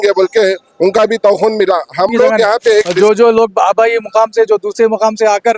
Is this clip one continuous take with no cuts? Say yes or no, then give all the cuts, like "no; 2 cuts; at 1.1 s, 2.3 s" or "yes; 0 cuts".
no; 1 cut; at 2.9 s